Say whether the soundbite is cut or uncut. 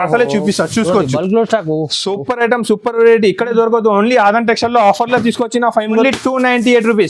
cut